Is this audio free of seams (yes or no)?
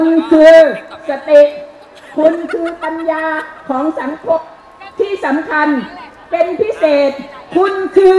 yes